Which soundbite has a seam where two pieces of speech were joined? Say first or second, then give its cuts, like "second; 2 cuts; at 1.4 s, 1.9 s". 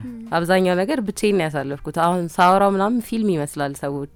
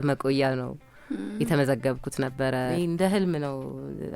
second; 1 cut; at 2.7 s